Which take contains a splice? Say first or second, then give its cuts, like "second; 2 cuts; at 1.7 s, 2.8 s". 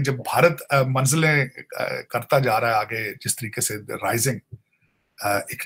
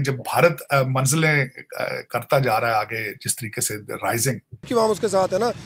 second; 1 cut; at 4.7 s